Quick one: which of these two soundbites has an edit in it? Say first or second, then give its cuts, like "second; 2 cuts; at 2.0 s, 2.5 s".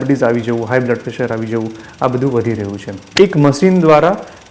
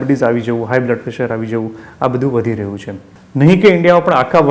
first; 1 cut; at 3.1 s